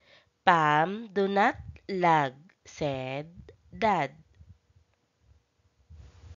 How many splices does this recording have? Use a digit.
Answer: 1